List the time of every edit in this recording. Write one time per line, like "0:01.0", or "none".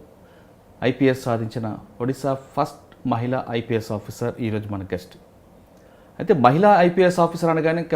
none